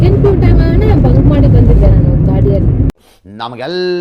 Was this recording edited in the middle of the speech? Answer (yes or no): yes